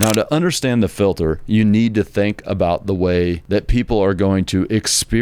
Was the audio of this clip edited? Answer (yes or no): yes